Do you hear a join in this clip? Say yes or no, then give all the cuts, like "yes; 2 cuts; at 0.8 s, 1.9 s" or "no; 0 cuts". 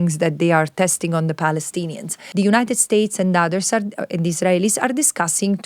yes; 1 cut; at 2.2 s